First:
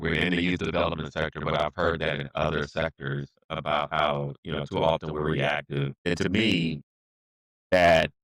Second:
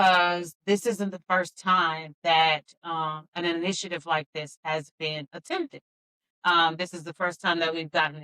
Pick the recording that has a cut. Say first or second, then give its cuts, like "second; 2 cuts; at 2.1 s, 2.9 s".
first; 1 cut; at 5.9 s